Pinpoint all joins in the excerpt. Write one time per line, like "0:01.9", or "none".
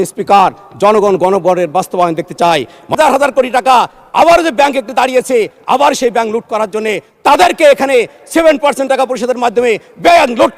0:03.0